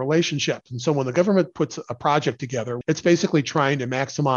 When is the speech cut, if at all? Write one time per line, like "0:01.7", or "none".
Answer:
0:02.8